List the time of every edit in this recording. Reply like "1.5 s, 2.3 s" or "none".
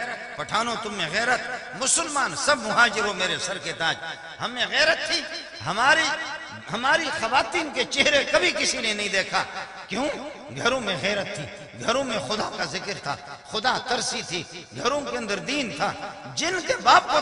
none